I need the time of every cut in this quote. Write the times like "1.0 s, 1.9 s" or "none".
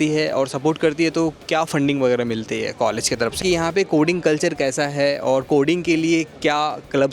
3.4 s